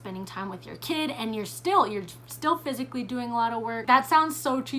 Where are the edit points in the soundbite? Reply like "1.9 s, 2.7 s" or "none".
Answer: 3.8 s

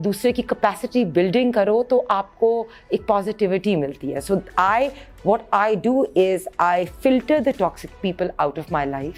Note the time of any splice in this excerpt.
none

